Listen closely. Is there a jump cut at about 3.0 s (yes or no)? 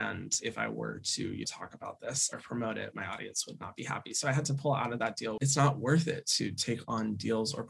no